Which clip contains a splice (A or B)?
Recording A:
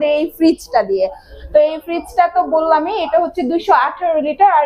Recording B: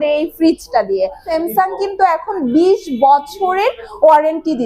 B